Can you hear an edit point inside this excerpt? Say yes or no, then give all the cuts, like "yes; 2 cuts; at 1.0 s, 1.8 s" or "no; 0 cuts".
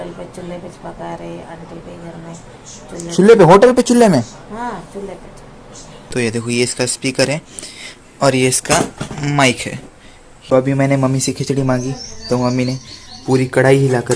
yes; 2 cuts; at 6.1 s, 10.5 s